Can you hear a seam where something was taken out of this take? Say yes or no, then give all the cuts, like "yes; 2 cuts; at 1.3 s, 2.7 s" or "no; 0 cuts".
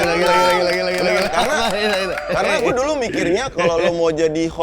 no; 0 cuts